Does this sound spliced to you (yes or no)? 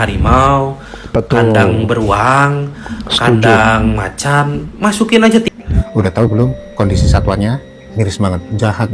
yes